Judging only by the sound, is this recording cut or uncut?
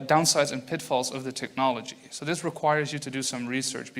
uncut